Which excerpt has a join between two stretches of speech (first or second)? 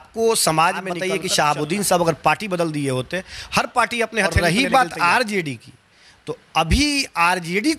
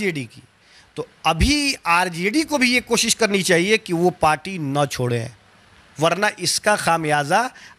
first